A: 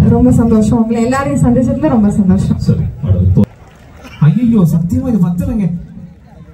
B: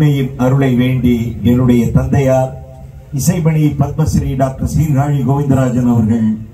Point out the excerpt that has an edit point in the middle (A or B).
A